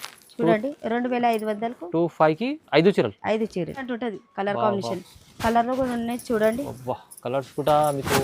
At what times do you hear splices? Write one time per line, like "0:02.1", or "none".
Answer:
0:03.9